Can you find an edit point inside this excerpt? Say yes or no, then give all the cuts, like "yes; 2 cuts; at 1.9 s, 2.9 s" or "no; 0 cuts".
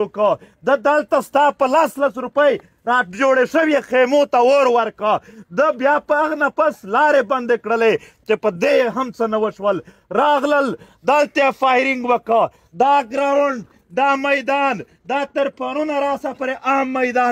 no; 0 cuts